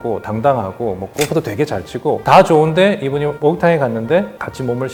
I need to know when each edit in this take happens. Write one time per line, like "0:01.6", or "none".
none